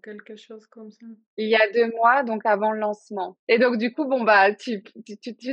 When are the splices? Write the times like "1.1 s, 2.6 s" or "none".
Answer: 3.3 s